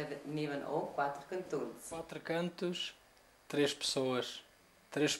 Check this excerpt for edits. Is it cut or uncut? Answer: cut